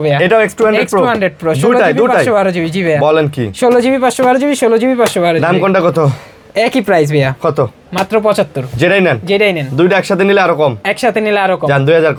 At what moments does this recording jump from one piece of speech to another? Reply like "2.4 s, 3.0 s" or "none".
none